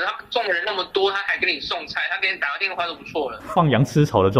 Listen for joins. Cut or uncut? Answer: cut